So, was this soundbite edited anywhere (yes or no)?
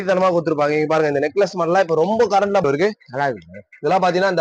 yes